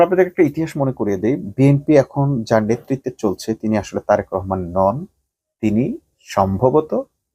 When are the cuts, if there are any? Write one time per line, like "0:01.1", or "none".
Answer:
none